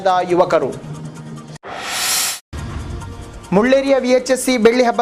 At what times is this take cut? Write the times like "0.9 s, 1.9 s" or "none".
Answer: 1.2 s, 3.4 s